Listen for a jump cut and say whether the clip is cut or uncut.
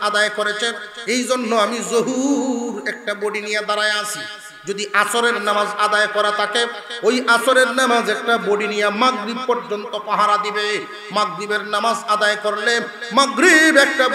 uncut